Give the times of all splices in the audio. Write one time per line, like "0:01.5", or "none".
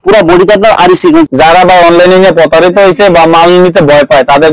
0:01.3